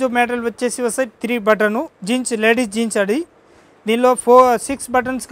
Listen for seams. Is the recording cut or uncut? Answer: cut